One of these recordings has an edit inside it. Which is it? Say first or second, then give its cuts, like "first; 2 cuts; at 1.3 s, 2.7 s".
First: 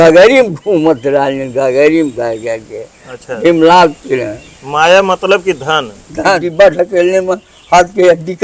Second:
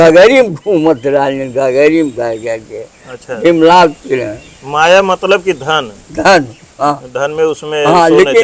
first; 1 cut; at 6.4 s